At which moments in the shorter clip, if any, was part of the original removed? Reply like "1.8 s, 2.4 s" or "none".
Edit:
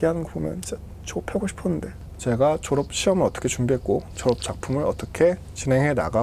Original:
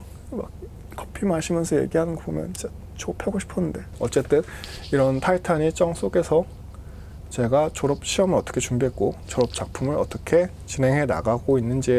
1.9 s